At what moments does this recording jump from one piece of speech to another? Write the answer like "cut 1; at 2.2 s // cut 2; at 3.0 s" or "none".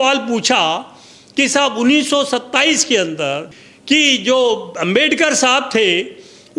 cut 1; at 3.5 s